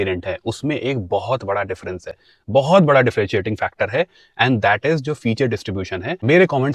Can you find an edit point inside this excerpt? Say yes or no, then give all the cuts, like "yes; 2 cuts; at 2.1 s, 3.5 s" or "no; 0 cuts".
no; 0 cuts